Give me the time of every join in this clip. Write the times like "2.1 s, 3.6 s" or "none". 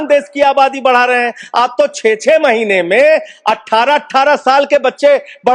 none